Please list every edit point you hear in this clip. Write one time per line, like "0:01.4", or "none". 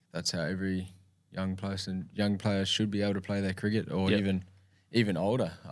none